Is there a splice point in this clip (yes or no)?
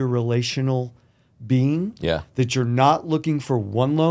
no